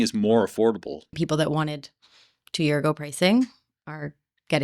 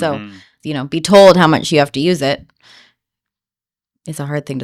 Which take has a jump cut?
first; 1 cut; at 1.1 s

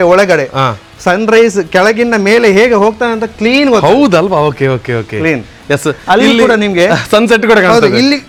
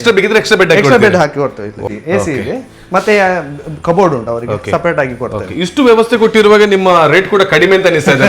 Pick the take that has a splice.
second; 1 cut; at 1.9 s

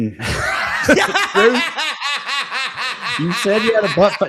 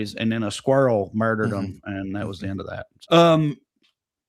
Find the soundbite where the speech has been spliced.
second; 1 cut; at 2.9 s

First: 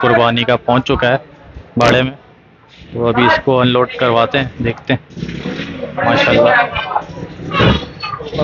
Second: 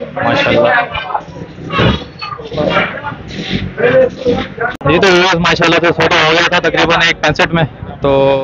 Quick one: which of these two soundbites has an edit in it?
second; 1 cut; at 4.6 s

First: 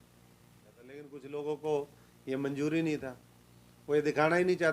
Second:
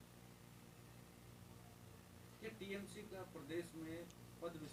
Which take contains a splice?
first; 1 cut; at 1.1 s

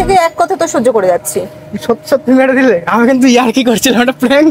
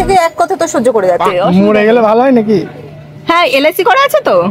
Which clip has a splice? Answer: second; 1 cut; at 1.3 s

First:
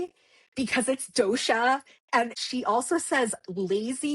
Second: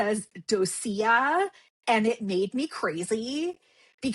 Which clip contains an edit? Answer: first; 1 cut; at 2.5 s

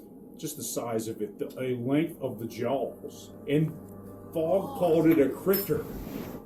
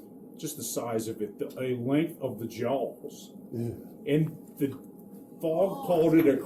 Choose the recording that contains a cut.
first; 2 cuts; at 3.3 s, 3.8 s

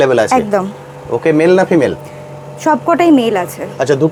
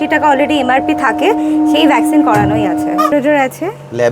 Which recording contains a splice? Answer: second; 1 cut; at 3.1 s

